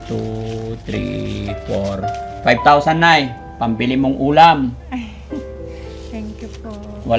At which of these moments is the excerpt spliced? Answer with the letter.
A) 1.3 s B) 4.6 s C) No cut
C